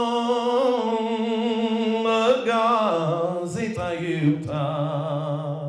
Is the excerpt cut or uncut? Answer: uncut